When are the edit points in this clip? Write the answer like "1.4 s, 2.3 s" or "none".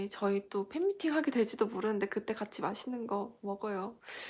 none